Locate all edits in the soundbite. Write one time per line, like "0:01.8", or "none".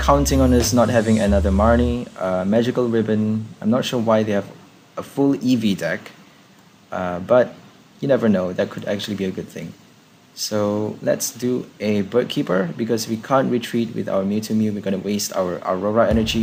none